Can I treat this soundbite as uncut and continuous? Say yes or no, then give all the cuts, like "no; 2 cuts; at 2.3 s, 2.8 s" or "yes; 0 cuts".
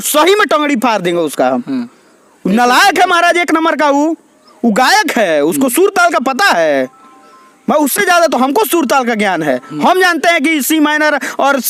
yes; 0 cuts